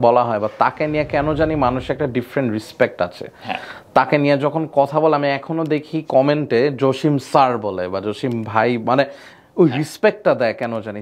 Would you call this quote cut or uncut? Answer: uncut